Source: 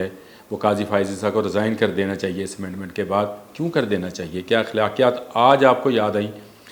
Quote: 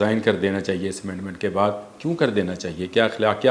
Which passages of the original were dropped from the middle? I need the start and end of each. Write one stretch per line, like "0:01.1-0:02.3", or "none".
none